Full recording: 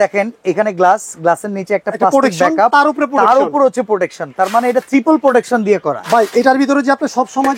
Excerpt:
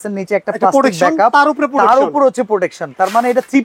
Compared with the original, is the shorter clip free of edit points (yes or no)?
yes